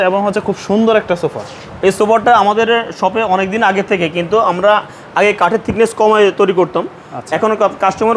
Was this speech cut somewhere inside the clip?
no; 0 cuts

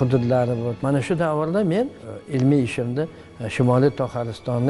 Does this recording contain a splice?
yes; 2 cuts; at 0.8 s, 2.0 s

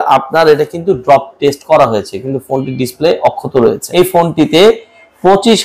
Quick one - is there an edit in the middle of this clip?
yes; 1 cut; at 3.8 s

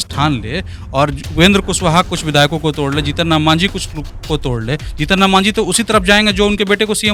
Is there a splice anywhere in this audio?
no; 0 cuts

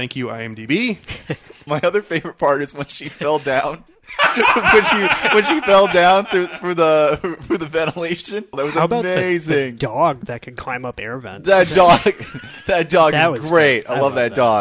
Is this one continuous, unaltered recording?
no; 2 cuts; at 1.5 s, 8.6 s

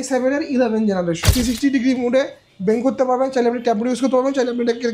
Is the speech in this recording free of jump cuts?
no; 1 cut; at 1.3 s

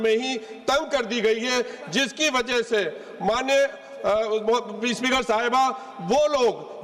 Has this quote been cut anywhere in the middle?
no; 0 cuts

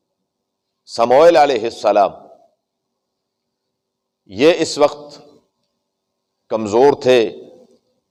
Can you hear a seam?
no; 0 cuts

